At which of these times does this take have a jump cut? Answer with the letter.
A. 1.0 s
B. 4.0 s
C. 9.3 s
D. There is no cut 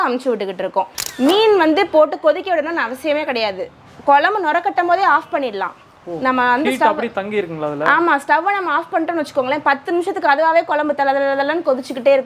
A